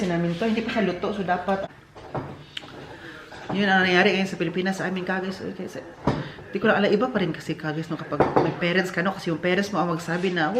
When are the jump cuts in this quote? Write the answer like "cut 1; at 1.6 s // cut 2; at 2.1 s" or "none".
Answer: cut 1; at 1.6 s